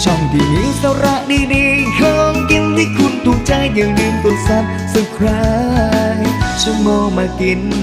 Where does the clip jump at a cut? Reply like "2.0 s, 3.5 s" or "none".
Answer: none